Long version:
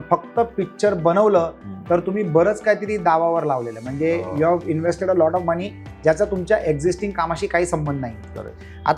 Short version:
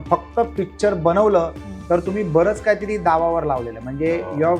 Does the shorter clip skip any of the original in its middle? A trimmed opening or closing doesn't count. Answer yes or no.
no